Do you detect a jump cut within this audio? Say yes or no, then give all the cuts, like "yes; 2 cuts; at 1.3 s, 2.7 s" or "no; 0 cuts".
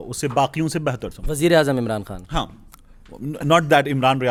no; 0 cuts